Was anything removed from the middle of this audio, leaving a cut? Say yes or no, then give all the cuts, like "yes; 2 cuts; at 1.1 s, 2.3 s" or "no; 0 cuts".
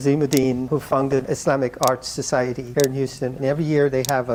no; 0 cuts